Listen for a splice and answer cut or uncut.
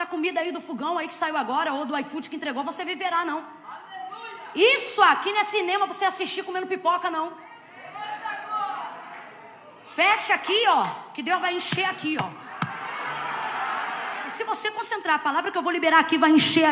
cut